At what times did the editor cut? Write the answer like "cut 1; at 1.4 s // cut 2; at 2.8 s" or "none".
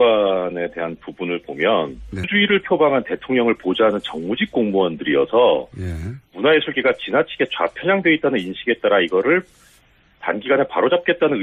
none